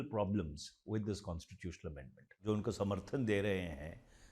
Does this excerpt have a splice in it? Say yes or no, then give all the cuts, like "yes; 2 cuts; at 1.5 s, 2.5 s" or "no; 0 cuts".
yes; 1 cut; at 2.4 s